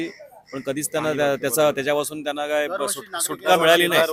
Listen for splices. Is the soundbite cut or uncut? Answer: uncut